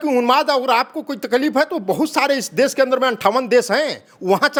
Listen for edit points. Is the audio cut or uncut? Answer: uncut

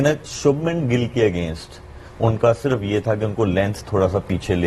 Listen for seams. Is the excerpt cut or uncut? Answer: uncut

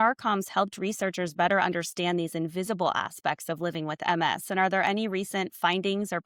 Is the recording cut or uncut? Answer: uncut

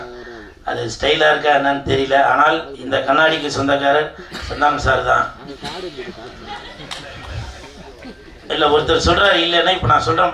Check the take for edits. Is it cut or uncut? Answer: uncut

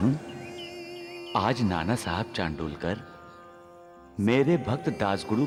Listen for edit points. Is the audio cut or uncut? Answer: uncut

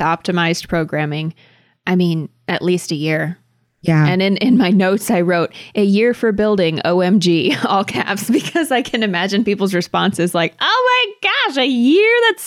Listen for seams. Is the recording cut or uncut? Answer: uncut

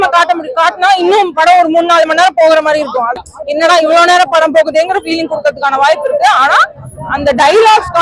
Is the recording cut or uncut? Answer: cut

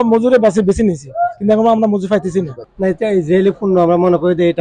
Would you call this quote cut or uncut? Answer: cut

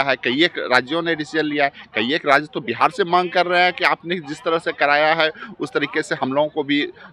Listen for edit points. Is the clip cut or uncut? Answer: uncut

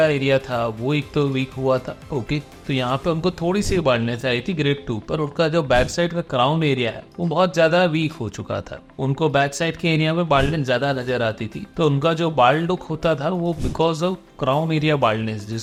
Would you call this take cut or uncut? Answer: uncut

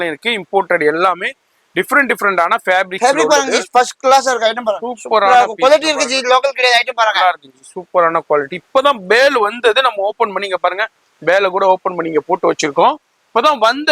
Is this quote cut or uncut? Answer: uncut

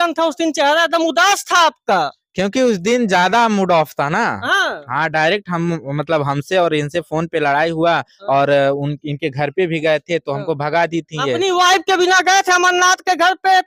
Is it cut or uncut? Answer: uncut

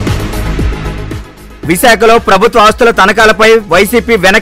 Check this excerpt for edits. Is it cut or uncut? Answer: cut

